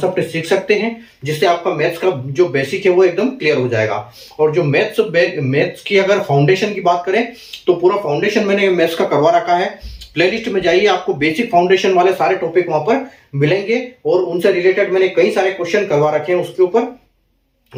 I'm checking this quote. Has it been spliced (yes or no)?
no